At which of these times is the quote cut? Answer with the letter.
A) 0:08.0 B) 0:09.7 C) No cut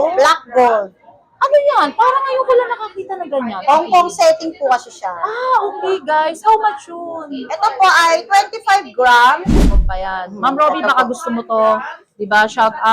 B